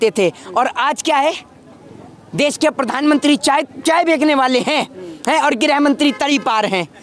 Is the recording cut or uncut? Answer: uncut